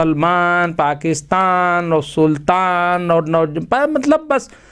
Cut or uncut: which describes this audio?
uncut